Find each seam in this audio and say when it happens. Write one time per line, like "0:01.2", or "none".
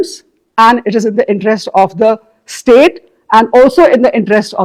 none